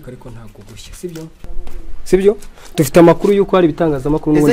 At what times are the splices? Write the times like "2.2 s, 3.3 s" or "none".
1.5 s